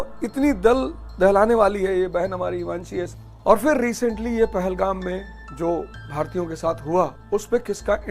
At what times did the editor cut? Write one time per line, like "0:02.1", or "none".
0:03.1
0:05.4
0:06.0
0:07.2